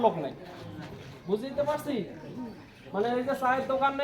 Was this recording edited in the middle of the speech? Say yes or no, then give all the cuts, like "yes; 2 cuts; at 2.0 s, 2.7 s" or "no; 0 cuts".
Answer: no; 0 cuts